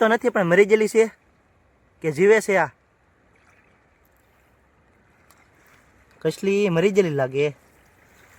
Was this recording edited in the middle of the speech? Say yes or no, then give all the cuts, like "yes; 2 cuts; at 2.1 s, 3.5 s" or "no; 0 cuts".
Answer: no; 0 cuts